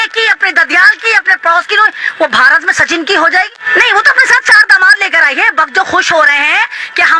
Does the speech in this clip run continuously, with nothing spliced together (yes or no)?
no